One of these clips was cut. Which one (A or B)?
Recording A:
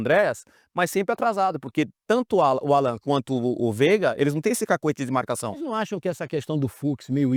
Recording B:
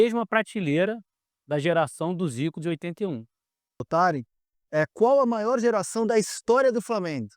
B